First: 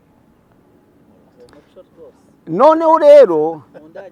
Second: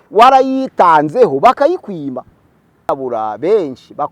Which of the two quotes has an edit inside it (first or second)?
second